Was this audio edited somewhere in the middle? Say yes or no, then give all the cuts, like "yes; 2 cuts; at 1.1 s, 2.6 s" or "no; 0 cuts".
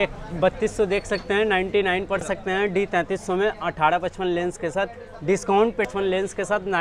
yes; 2 cuts; at 2.2 s, 5.8 s